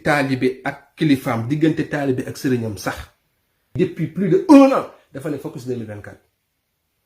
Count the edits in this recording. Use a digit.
1